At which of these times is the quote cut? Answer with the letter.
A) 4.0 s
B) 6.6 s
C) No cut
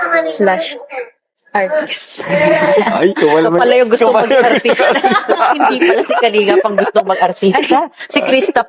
B